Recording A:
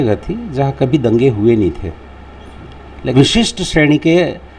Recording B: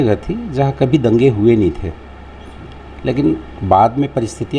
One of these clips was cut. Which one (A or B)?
A